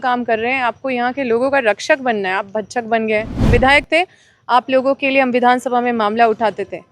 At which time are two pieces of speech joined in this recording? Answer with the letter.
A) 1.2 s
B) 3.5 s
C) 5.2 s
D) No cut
B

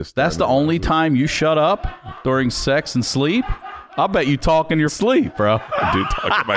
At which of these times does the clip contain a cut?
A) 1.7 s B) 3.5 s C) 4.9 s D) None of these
C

